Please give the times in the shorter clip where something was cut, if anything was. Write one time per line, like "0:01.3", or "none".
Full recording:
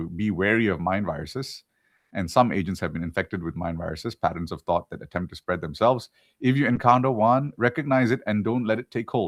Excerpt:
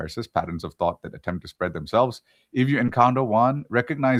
none